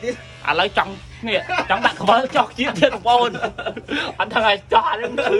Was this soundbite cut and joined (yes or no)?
no